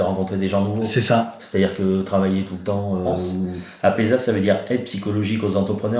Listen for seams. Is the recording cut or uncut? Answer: cut